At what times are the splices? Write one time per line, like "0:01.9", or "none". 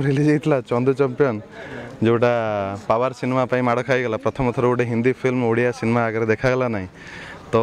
none